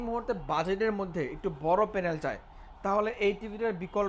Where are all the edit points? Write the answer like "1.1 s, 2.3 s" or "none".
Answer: none